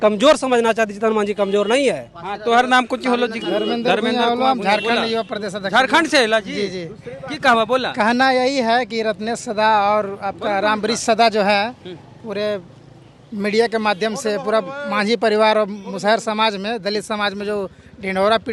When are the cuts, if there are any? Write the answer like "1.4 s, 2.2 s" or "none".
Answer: none